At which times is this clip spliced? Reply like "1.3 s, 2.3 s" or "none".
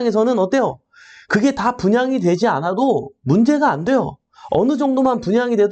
none